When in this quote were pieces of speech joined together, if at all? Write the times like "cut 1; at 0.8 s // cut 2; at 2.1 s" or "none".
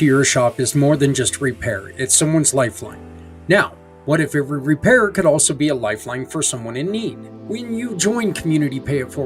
none